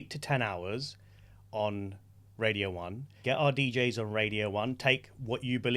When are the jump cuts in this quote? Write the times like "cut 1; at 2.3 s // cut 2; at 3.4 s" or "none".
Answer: cut 1; at 3.2 s